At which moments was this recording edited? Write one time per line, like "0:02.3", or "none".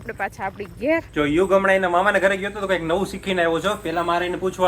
0:01.1